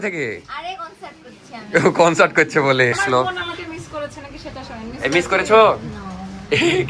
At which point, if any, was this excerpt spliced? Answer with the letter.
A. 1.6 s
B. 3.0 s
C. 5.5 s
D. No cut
B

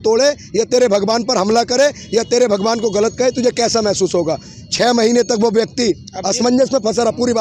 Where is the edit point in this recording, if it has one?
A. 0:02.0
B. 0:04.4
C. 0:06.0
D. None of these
D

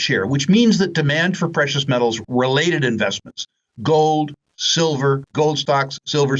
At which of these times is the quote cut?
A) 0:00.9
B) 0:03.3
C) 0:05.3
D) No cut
C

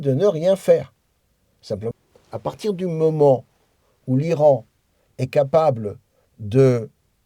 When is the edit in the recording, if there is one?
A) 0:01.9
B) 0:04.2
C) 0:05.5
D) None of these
A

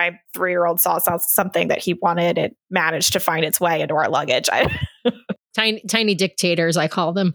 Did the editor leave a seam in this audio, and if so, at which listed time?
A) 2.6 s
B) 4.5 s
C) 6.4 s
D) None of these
D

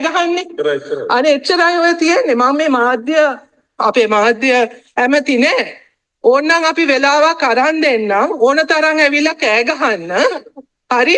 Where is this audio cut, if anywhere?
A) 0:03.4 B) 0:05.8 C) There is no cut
C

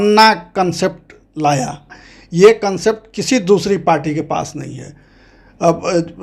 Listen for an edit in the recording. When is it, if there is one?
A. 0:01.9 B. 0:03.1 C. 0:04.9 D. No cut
A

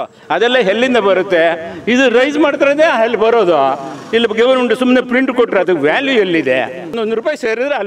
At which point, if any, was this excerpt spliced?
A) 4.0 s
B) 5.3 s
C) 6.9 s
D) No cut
C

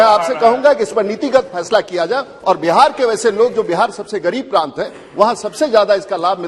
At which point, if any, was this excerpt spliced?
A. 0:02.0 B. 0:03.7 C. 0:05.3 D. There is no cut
D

